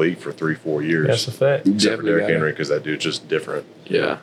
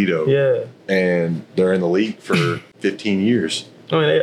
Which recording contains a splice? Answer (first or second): second